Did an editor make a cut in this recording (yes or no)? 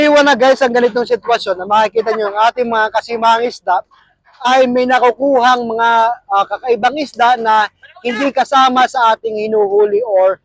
no